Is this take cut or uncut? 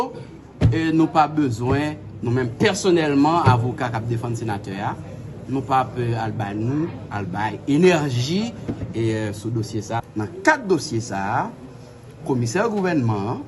cut